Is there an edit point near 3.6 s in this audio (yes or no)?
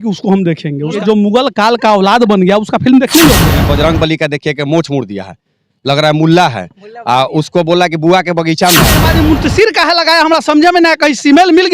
yes